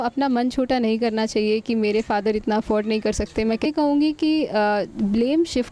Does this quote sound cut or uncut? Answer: cut